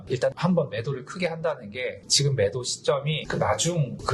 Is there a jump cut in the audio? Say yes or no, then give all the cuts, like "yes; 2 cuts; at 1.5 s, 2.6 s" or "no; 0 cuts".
no; 0 cuts